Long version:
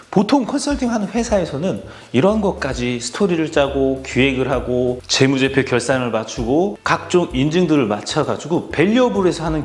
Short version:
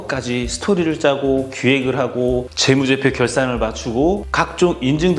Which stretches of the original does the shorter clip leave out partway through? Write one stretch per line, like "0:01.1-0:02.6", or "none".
none